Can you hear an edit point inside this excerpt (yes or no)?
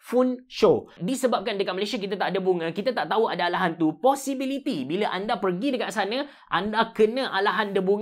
yes